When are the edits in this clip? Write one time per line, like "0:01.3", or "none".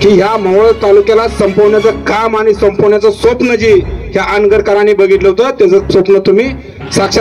none